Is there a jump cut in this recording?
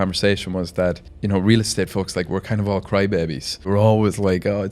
yes; 2 cuts; at 1.1 s, 3.7 s

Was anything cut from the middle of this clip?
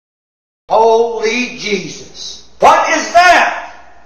no; 0 cuts

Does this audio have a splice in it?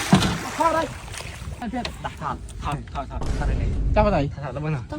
yes; 1 cut; at 1.6 s

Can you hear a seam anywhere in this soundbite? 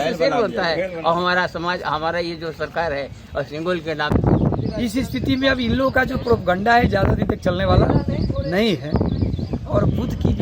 yes; 1 cut; at 4.1 s

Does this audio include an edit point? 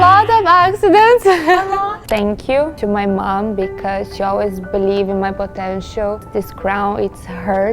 yes; 2 cuts; at 2.3 s, 6.3 s

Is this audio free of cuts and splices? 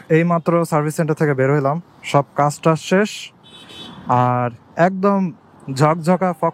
yes; 0 cuts

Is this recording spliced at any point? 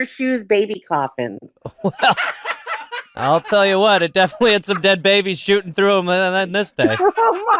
no; 0 cuts

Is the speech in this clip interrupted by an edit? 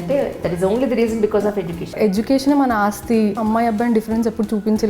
yes; 2 cuts; at 1.9 s, 3.4 s

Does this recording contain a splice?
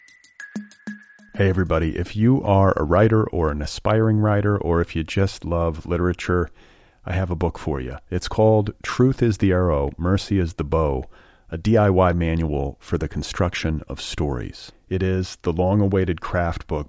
yes; 1 cut; at 0.9 s

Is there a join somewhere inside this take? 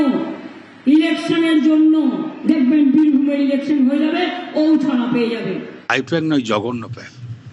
yes; 1 cut; at 5.8 s

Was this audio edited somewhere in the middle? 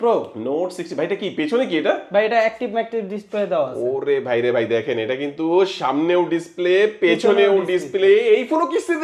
no; 0 cuts

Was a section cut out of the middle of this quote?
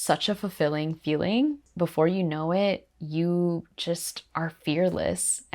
yes; 1 cut; at 1.6 s

